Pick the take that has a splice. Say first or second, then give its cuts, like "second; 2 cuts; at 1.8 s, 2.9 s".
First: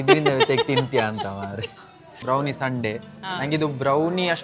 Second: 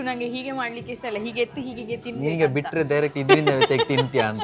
first; 1 cut; at 2.1 s